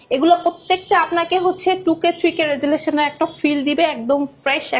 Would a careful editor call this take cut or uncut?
uncut